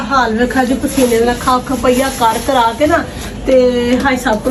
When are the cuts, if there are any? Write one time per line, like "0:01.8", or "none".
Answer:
none